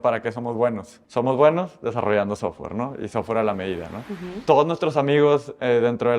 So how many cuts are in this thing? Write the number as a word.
two